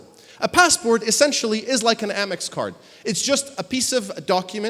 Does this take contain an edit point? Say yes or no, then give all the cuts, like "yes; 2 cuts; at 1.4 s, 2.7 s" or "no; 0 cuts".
no; 0 cuts